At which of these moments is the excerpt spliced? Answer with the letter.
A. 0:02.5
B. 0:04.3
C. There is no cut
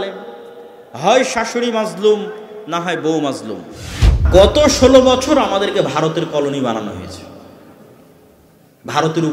B